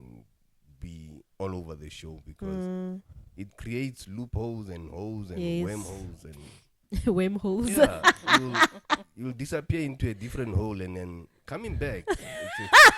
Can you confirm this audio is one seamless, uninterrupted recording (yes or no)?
yes